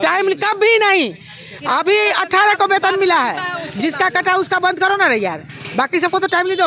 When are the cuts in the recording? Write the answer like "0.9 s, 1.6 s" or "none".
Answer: none